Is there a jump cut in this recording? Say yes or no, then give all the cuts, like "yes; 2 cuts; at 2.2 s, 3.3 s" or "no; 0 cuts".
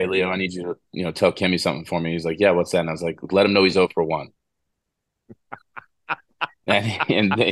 no; 0 cuts